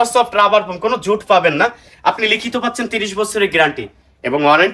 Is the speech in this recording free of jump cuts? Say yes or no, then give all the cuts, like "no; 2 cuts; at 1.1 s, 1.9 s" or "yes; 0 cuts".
yes; 0 cuts